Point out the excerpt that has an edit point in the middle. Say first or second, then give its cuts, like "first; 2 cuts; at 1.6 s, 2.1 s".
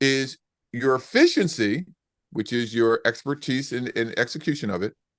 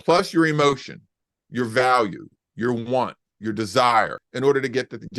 second; 2 cuts; at 0.9 s, 4.2 s